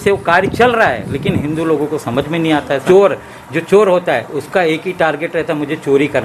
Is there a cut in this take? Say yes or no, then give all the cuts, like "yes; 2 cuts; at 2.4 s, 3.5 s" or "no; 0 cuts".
yes; 1 cut; at 2.8 s